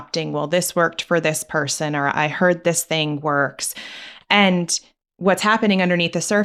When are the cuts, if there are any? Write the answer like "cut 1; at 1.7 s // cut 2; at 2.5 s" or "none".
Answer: none